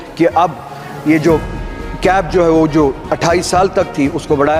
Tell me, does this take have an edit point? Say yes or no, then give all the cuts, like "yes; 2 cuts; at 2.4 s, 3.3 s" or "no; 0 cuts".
no; 0 cuts